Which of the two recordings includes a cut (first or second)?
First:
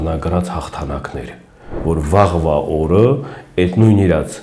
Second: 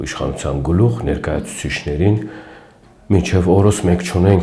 first